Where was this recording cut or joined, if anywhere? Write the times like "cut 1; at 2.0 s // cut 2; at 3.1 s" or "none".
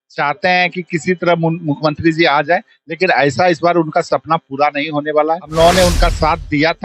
cut 1; at 5.4 s